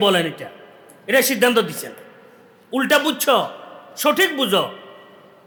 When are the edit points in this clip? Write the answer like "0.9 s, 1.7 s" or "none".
none